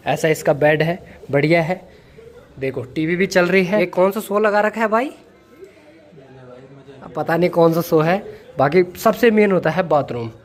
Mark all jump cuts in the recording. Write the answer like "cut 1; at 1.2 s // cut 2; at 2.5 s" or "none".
none